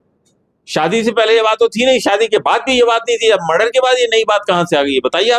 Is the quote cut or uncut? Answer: uncut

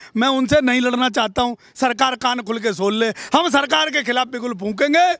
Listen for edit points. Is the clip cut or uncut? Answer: uncut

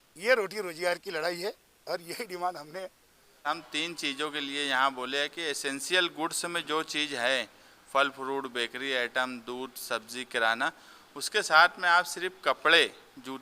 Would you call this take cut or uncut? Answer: cut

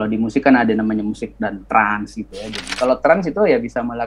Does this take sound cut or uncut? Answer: cut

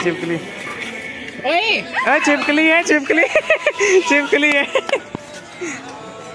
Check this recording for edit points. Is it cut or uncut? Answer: uncut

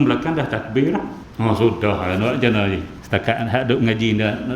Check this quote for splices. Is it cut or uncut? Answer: cut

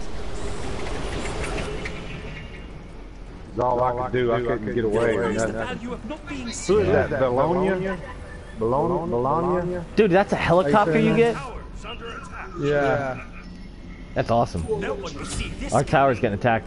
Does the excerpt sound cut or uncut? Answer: uncut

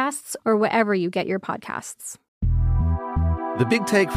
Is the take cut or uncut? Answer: cut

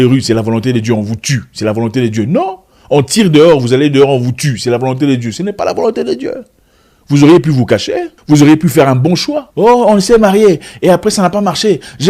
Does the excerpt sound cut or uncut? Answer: cut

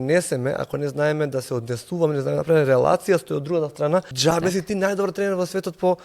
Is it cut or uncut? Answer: cut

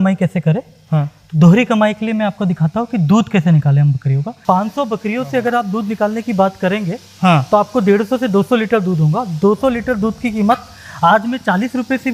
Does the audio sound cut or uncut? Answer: cut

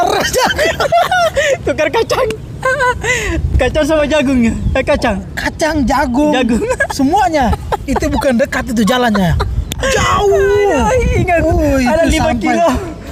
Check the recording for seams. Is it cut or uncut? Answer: uncut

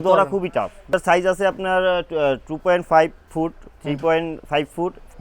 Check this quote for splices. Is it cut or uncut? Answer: cut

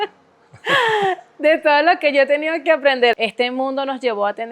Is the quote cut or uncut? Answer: cut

